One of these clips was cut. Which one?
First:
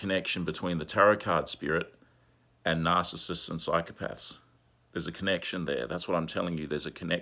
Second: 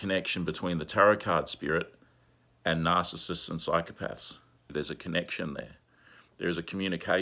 second; 1 cut; at 4.7 s

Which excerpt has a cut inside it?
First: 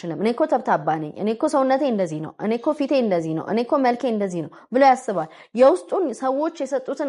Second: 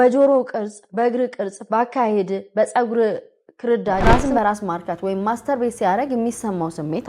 second; 1 cut; at 4.0 s

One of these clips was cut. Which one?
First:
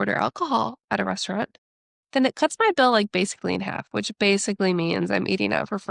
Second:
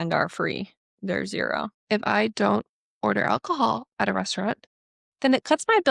second; 1 cut; at 1.7 s

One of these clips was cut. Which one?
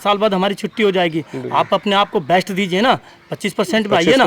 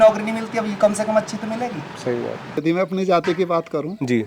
second; 1 cut; at 2.6 s

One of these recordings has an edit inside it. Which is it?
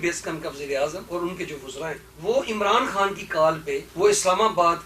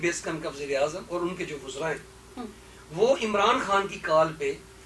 first; 2 cuts; at 2.1 s, 3.9 s

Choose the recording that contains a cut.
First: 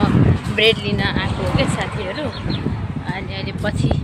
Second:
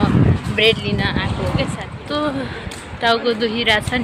second; 1 cut; at 1.9 s

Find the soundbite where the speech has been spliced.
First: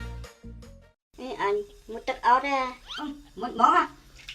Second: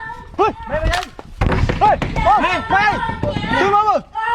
first; 1 cut; at 1.0 s

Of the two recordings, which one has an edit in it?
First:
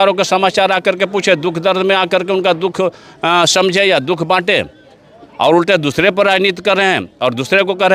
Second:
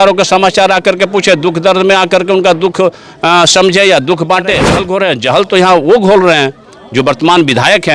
second; 1 cut; at 4.9 s

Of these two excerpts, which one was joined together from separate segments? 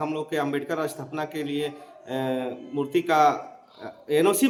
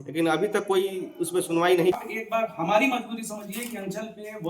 second; 1 cut; at 2.1 s

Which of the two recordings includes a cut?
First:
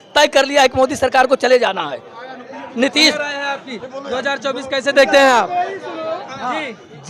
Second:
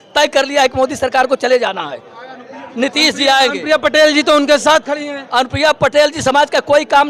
first; 1 cut; at 3.1 s

